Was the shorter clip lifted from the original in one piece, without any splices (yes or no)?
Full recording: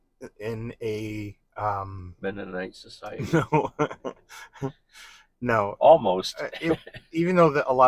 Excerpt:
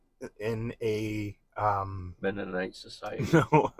yes